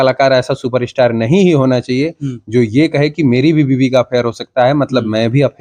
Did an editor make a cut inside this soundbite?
no; 0 cuts

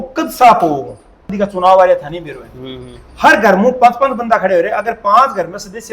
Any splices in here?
yes; 1 cut; at 1.3 s

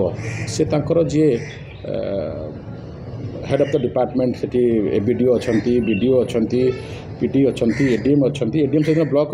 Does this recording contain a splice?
no; 0 cuts

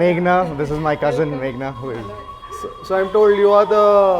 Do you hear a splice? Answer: no; 0 cuts

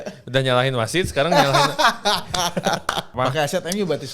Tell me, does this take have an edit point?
yes; 1 cut; at 3.1 s

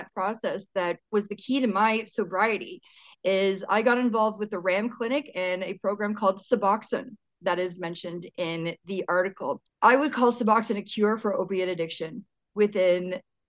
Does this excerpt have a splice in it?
yes; 1 cut; at 1.0 s

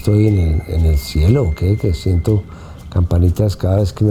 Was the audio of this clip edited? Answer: no; 0 cuts

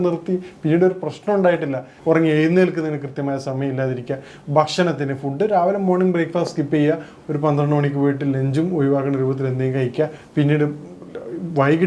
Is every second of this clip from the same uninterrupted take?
no; 1 cut; at 1.9 s

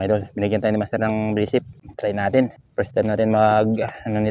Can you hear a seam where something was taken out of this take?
yes; 2 cuts; at 1.8 s, 2.6 s

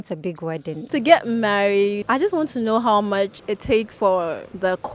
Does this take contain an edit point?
yes; 3 cuts; at 0.9 s, 2.0 s, 3.9 s

